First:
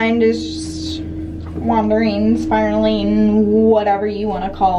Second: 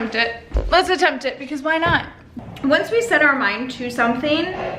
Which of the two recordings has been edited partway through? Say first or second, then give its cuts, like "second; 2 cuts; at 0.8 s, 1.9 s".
second; 1 cut; at 2.2 s